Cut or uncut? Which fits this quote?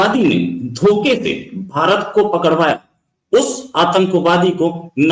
uncut